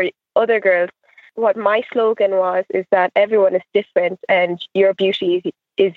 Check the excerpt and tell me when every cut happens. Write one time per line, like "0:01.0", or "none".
0:01.3